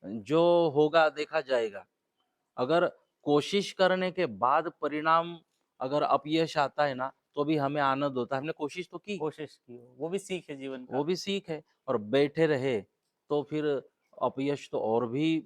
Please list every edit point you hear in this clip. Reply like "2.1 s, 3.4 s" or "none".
none